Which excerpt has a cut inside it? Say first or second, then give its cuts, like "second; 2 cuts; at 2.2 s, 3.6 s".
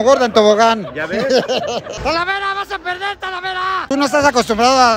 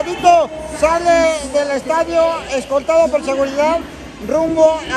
first; 2 cuts; at 1.9 s, 3.9 s